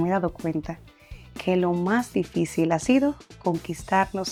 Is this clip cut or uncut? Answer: uncut